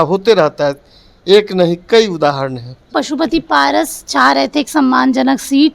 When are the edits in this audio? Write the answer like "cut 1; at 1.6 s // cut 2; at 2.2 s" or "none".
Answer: cut 1; at 2.9 s